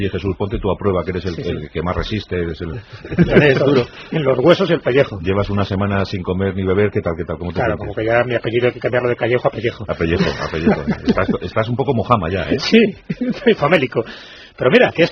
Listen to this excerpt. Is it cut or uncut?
uncut